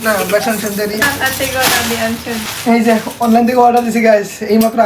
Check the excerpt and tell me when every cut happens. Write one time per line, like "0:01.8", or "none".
0:01.0
0:02.5